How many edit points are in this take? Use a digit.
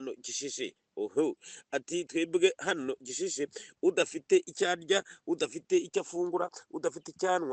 0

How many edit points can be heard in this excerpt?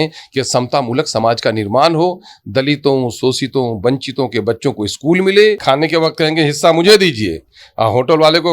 1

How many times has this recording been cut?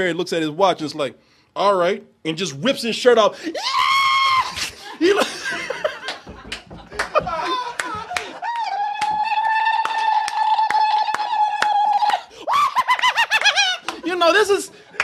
0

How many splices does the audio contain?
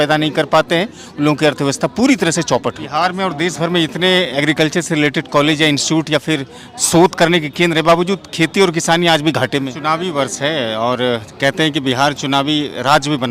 2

